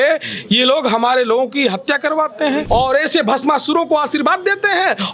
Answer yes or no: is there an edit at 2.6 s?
yes